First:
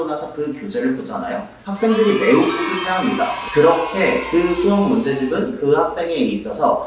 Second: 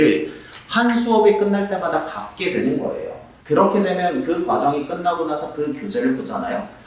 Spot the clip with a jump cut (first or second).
first